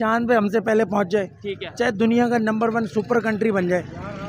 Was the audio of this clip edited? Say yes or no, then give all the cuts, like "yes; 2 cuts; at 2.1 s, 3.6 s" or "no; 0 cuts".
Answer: no; 0 cuts